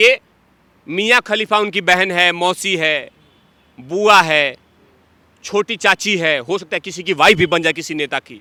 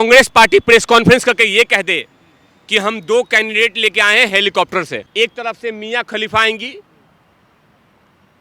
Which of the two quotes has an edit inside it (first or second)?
second